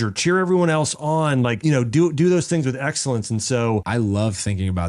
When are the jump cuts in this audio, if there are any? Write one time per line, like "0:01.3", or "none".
0:01.6
0:03.9